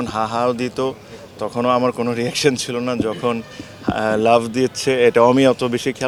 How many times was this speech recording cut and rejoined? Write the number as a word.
zero